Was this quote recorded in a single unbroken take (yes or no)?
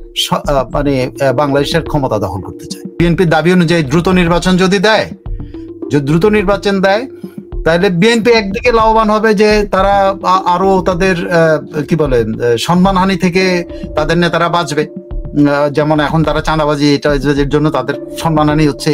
no